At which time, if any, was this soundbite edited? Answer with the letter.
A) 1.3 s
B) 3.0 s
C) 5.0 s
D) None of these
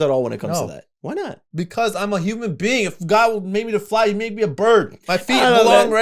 C